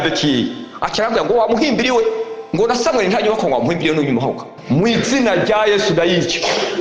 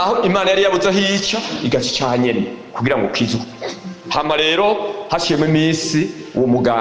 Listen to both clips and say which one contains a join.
first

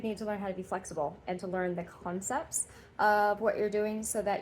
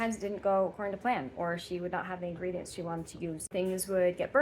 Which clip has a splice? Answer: second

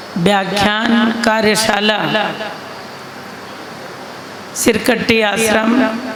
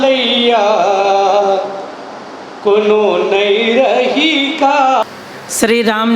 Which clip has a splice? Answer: second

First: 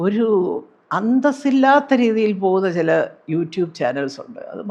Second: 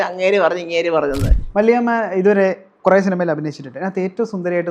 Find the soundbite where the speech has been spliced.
second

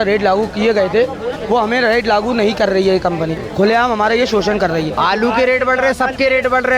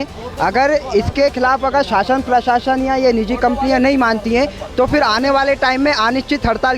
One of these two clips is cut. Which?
first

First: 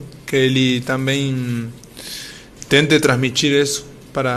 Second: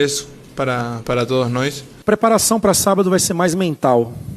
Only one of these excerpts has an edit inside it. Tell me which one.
second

